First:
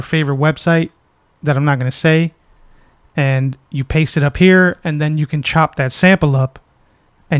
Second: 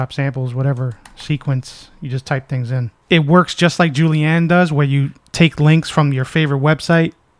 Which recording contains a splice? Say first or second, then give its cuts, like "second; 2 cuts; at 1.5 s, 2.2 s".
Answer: second; 1 cut; at 2.9 s